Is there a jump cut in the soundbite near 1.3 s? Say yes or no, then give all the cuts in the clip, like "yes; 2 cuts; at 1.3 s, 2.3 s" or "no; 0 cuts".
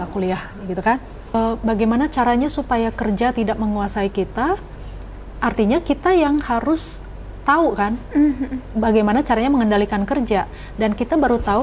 yes; 1 cut; at 1.3 s